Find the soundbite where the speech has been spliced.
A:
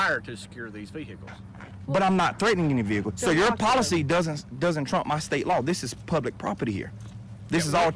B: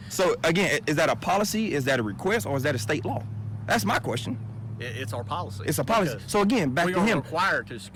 A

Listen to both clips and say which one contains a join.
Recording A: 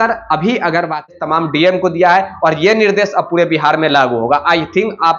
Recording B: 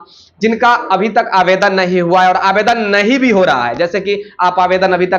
A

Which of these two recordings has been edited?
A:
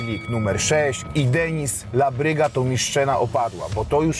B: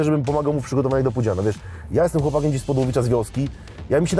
A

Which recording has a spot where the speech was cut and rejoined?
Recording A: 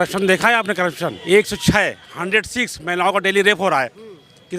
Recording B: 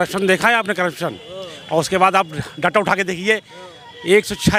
A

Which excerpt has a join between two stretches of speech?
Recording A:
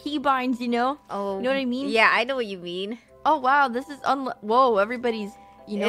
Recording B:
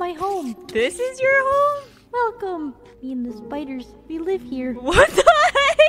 A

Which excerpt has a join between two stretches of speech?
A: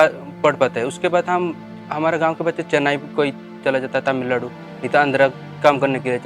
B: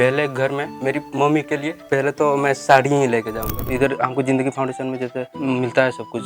B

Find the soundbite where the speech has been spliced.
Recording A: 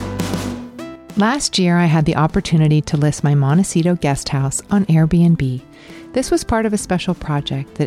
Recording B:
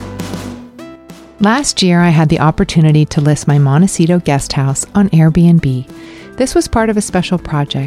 A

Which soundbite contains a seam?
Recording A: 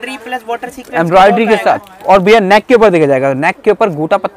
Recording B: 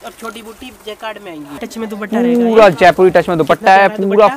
B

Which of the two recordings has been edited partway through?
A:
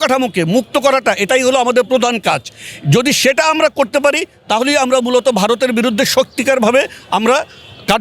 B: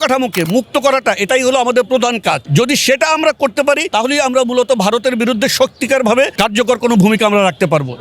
B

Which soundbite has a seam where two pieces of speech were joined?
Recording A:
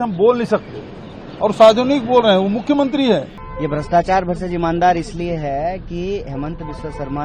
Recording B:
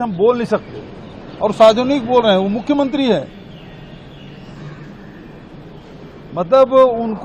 A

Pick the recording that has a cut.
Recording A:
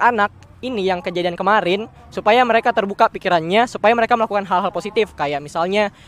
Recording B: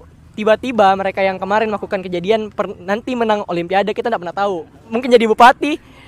B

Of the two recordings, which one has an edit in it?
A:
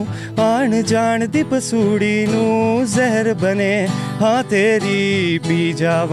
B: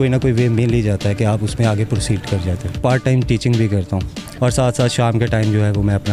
B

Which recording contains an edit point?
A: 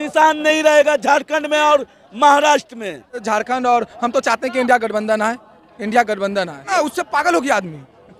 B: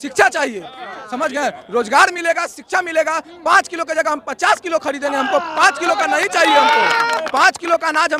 A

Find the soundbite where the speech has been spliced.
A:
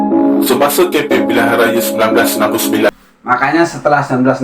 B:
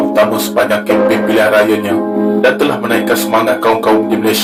A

